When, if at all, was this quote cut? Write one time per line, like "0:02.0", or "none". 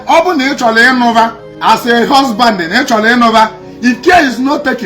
0:01.5